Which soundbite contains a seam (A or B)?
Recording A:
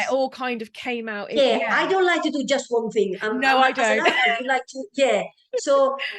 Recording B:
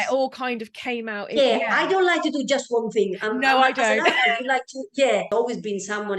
B